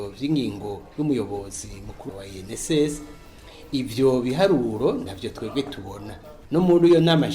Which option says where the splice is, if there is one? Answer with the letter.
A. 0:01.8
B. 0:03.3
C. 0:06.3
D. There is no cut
C